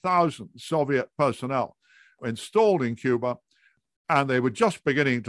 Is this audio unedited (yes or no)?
no